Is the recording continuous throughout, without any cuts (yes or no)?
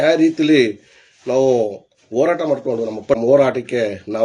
no